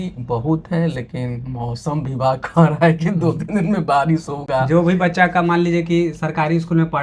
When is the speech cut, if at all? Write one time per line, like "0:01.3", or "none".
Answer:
none